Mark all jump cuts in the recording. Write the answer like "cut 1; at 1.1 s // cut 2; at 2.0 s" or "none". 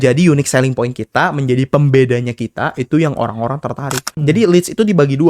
cut 1; at 4.2 s